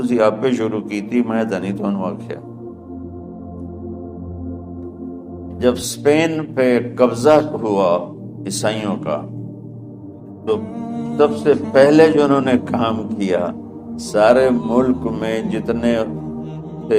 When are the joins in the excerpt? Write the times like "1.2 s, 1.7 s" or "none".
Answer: 2.5 s, 5.0 s

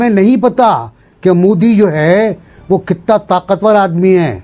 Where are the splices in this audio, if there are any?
none

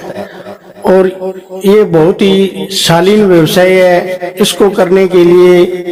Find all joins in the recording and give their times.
none

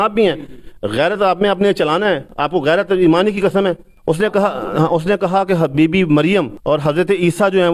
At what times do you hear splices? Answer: 2.3 s, 3.9 s, 6.5 s

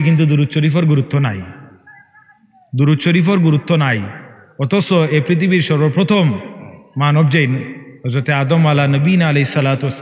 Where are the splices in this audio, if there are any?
none

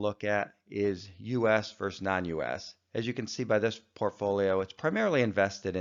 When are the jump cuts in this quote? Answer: none

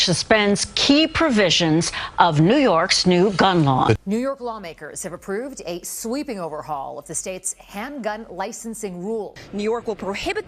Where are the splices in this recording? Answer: none

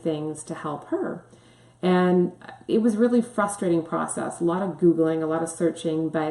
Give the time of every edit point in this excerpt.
none

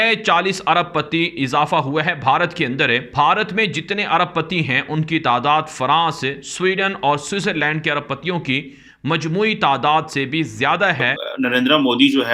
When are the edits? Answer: 3.1 s, 11.2 s

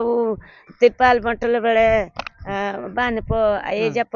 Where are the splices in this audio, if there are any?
none

